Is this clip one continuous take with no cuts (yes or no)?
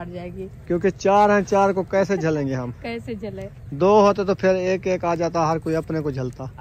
yes